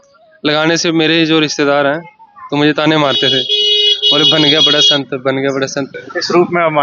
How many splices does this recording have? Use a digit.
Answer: 1